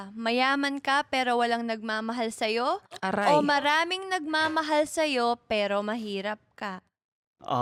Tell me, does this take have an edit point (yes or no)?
no